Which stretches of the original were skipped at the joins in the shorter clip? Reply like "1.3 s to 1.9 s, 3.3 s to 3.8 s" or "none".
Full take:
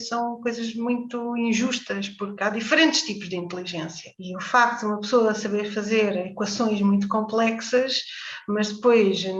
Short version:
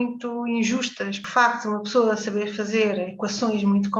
2.1 s to 4.4 s